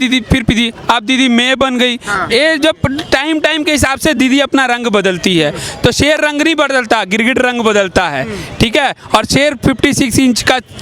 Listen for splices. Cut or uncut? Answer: uncut